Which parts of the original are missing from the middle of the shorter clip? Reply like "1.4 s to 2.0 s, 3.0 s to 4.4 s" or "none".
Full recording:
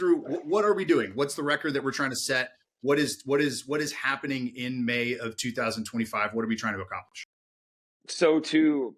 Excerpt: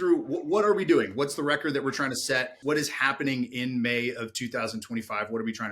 2.6 s to 3.6 s